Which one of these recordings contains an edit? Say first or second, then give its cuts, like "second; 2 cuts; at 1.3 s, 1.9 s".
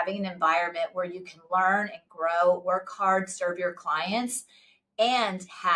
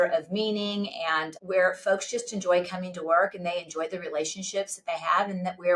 second; 1 cut; at 1.3 s